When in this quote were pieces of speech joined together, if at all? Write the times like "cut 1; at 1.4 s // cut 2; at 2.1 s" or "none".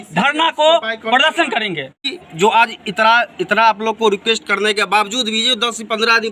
cut 1; at 2.2 s